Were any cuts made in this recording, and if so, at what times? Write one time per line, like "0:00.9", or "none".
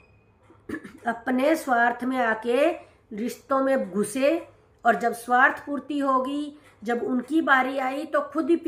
none